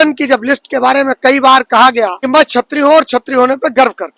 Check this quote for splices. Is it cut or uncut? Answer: cut